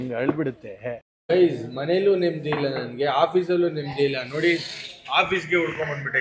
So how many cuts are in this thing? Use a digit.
1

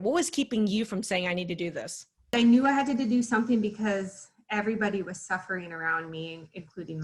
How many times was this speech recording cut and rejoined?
1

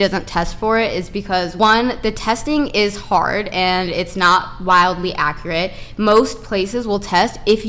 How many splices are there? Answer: 1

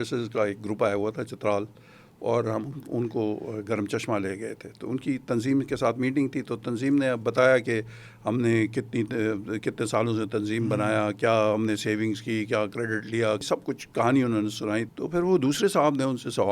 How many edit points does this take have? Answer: 2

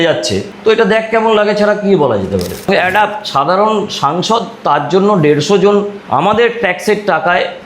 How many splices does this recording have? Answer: 1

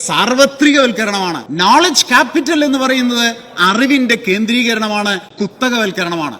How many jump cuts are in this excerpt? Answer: 1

